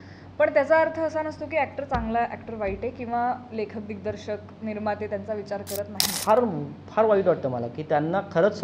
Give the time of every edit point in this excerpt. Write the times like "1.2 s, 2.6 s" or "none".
6.1 s